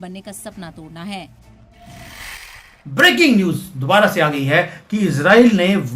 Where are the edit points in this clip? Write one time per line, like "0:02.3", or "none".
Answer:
0:02.1

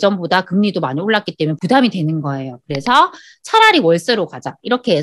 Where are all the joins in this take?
0:01.6

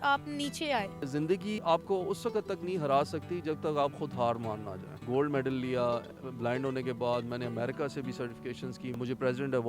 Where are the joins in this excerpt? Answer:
0:01.4
0:05.0
0:08.9

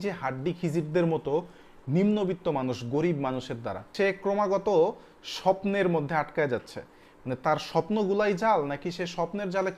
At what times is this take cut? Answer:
0:03.9

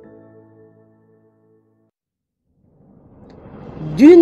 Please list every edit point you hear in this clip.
0:01.9

